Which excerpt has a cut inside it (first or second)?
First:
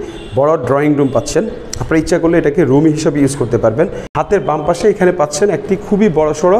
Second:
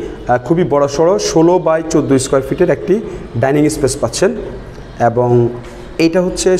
first